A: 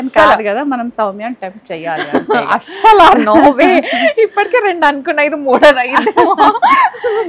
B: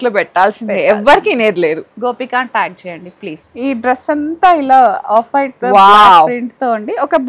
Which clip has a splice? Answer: B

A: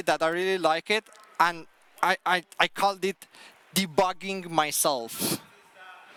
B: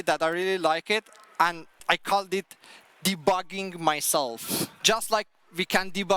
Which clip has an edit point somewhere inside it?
B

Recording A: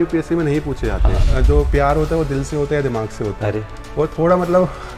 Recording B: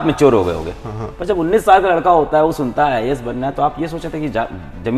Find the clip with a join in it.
A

